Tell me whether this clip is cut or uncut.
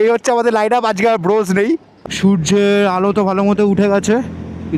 cut